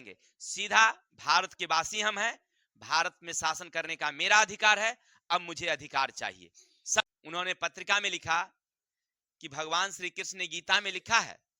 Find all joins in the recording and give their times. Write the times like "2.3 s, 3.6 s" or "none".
7.0 s